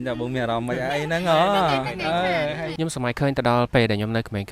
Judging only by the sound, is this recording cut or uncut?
cut